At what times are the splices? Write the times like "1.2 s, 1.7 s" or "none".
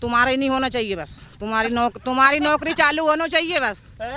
none